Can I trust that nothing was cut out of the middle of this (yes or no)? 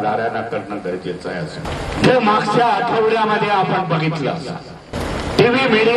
no